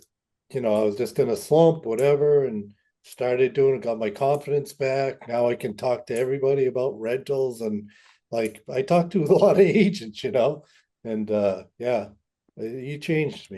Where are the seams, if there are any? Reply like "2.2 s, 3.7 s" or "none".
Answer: none